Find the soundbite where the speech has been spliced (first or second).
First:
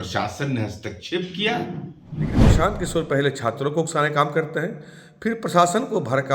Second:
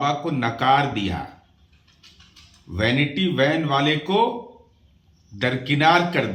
first